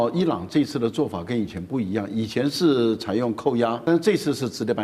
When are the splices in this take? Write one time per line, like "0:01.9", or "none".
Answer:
0:03.8